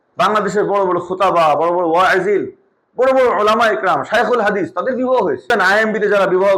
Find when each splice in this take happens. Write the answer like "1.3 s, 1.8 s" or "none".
5.5 s